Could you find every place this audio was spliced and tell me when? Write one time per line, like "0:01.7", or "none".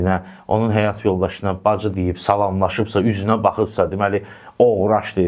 none